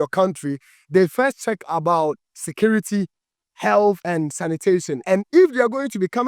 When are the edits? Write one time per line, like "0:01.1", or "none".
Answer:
0:04.5